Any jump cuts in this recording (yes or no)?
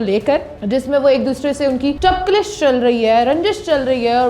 yes